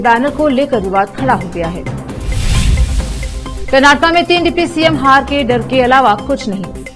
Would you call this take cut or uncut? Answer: uncut